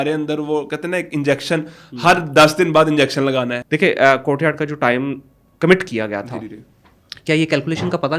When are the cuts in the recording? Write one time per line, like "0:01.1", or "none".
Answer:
0:03.6